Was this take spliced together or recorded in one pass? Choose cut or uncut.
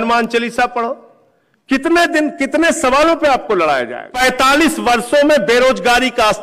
cut